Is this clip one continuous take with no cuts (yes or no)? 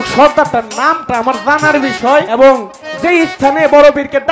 no